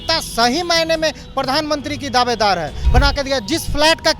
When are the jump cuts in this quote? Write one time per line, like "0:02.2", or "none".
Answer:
0:02.8